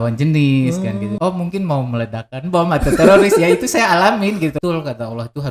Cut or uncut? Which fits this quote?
cut